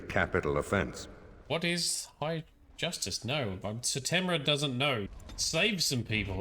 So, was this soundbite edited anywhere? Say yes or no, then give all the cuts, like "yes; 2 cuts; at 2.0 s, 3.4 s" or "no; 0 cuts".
yes; 1 cut; at 5.1 s